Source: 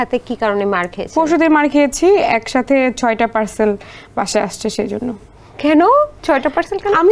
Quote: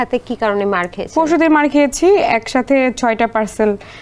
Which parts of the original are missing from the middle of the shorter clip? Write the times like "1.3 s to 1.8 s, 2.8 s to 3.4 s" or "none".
none